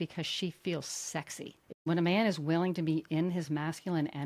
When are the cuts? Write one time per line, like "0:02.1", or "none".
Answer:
0:01.9